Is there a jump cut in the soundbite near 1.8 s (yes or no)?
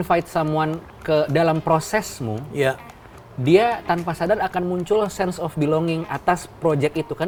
no